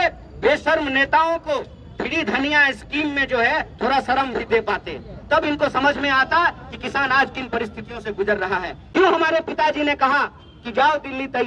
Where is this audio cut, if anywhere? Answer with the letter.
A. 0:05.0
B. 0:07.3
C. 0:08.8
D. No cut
C